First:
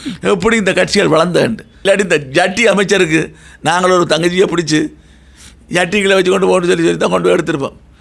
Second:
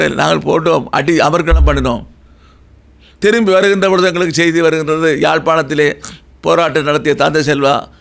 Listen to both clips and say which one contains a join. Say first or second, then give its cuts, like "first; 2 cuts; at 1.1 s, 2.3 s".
first; 1 cut; at 1.7 s